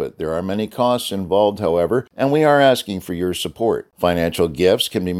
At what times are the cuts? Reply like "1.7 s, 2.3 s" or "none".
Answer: 2.1 s